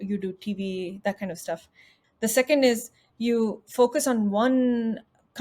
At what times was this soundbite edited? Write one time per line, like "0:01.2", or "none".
0:01.9